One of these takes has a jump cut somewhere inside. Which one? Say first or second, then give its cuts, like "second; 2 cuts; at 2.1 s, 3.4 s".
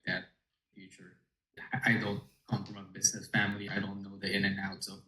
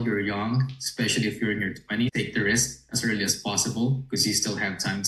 first; 1 cut; at 1.6 s